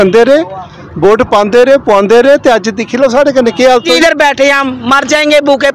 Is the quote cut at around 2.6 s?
no; 1 cut; at 3.9 s

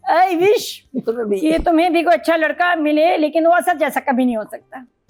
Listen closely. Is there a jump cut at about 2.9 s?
no; 0 cuts

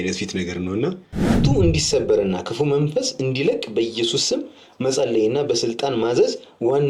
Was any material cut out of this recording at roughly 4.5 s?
no; 1 cut; at 1.4 s

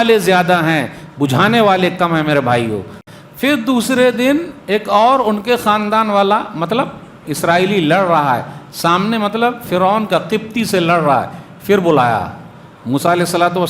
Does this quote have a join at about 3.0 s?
yes; 1 cut; at 3.0 s

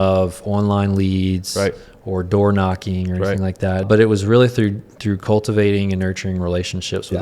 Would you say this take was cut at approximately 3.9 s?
yes; 1 cut; at 3.9 s

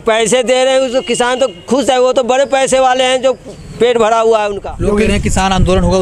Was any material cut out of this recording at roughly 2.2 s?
no; 1 cut; at 4.6 s

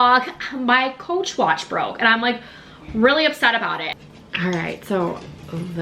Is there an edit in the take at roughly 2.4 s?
no; 1 cut; at 4.0 s

